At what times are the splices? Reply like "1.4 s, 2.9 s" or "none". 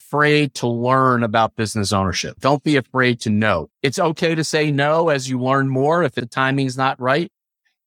3.7 s, 6.2 s